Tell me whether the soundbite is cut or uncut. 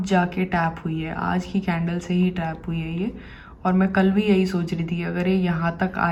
uncut